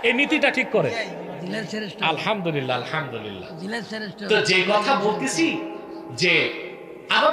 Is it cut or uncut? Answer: uncut